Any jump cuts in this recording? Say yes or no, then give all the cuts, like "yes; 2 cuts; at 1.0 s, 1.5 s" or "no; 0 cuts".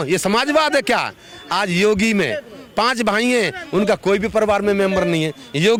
no; 0 cuts